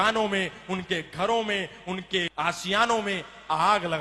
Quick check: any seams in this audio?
yes; 1 cut; at 2.3 s

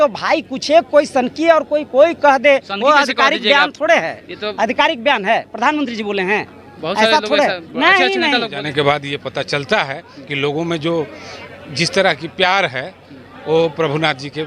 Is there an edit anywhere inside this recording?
yes; 1 cut; at 8.6 s

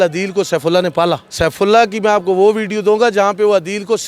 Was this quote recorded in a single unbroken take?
no; 1 cut; at 1.3 s

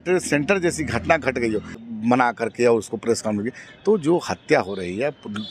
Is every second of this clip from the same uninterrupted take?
no; 1 cut; at 1.8 s

